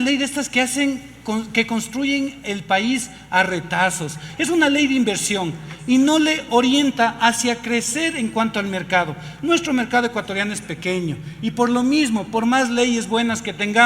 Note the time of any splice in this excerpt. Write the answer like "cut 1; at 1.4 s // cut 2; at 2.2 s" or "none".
cut 1; at 4.2 s